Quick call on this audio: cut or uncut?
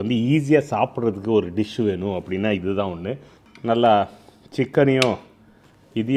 uncut